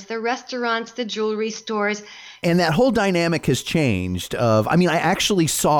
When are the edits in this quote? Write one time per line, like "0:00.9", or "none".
0:02.4